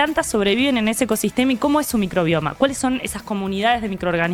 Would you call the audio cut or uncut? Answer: uncut